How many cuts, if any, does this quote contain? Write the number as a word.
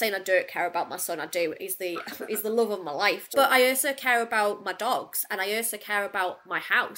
one